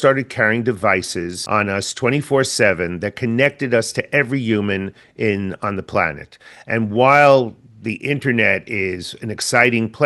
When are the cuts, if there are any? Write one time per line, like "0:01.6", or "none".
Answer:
0:01.4